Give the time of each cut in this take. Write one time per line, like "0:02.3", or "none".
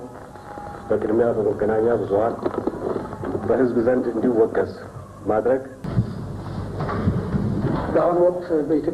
0:05.8

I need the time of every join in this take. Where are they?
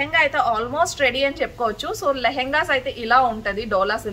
none

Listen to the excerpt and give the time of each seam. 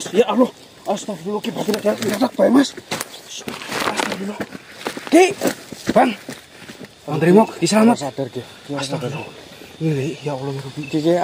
none

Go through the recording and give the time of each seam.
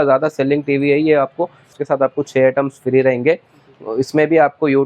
0:01.7

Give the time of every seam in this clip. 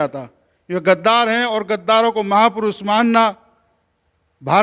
none

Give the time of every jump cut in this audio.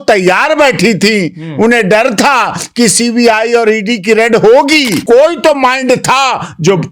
0:05.0

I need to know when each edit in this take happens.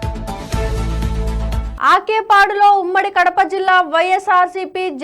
0:01.7

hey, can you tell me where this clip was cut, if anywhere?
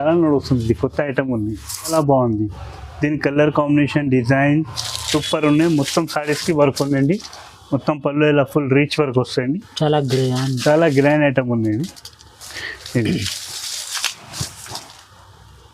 0:01.9

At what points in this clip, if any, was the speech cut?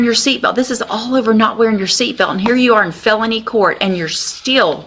none

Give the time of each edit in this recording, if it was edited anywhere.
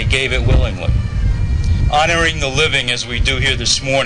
0:01.7

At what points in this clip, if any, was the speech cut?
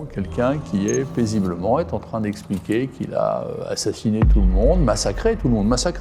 none

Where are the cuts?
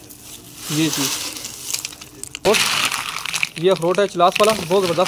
0:02.5

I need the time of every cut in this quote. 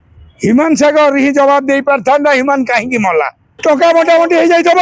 0:03.5

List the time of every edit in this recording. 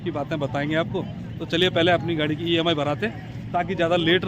none

